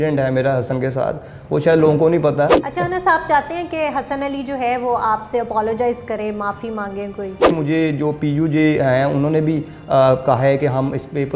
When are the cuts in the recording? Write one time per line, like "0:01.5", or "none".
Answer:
0:02.6
0:07.5